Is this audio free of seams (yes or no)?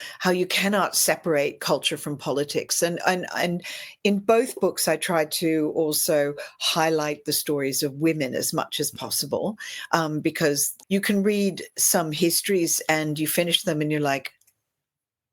no